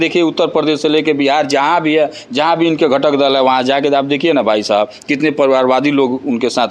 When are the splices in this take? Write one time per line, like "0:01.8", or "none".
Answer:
none